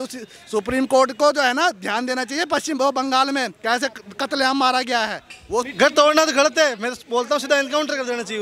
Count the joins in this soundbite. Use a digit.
1